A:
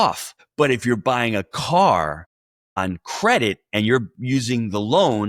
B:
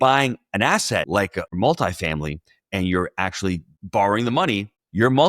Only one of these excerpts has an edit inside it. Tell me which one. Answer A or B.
B